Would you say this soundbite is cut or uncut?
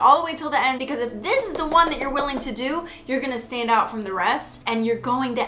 cut